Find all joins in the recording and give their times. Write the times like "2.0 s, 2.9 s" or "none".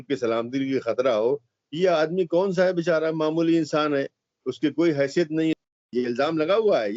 5.5 s